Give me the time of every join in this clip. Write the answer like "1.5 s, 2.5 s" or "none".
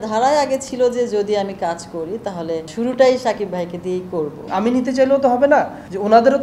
2.7 s, 4.5 s